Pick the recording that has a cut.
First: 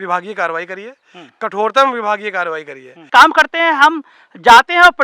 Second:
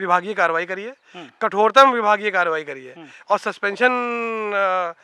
first; 1 cut; at 3.1 s

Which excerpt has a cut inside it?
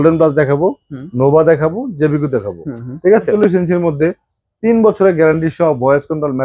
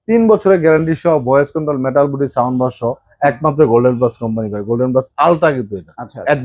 first; 1 cut; at 3.3 s

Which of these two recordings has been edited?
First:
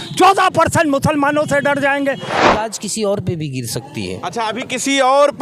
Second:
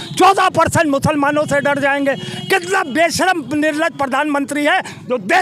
first; 1 cut; at 2.4 s

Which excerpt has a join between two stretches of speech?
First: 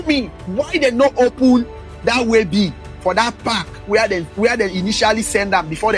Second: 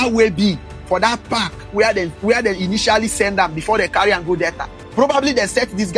second; 1 cut; at 4.8 s

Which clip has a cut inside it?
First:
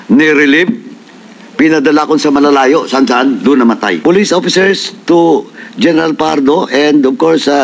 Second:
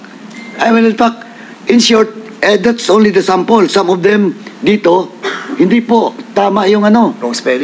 first; 1 cut; at 4.0 s

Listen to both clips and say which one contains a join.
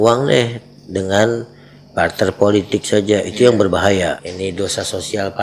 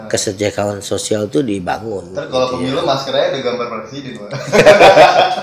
first; 1 cut; at 4.2 s

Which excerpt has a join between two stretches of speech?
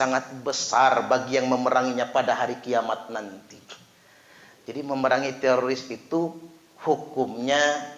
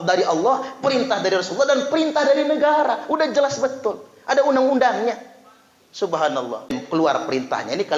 second; 1 cut; at 6.7 s

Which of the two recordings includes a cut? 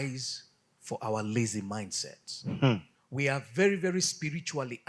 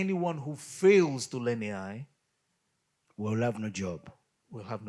first; 1 cut; at 3.0 s

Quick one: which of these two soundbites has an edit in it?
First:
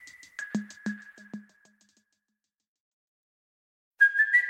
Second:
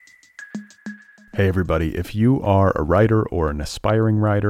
second; 1 cut; at 0.9 s

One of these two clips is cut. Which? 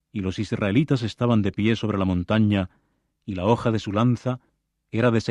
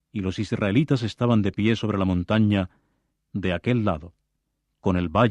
second; 1 cut; at 3.3 s

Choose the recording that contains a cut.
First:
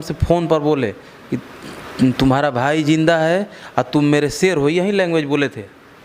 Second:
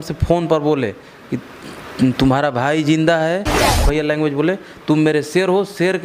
second; 1 cut; at 3.7 s

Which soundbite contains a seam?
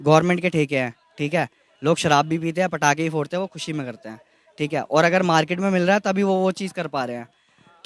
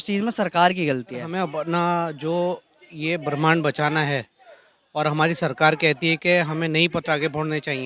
second; 1 cut; at 1.3 s

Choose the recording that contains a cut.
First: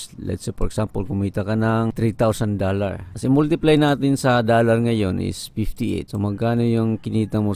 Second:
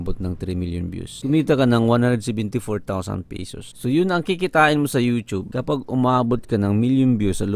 first; 2 cuts; at 1.9 s, 3.1 s

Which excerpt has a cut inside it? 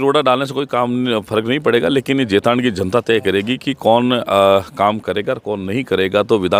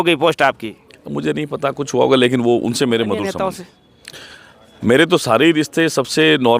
second; 1 cut; at 3.3 s

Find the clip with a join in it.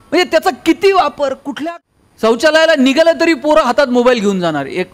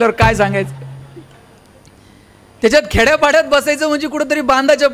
first; 1 cut; at 1.5 s

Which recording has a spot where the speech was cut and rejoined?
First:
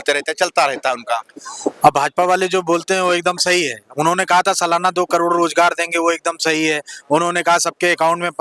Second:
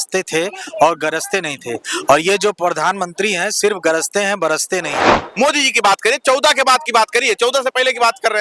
second; 1 cut; at 5.2 s

